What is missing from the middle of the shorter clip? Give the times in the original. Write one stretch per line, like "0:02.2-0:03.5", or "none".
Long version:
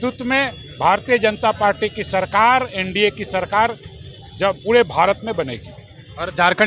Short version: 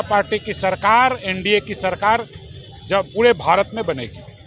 none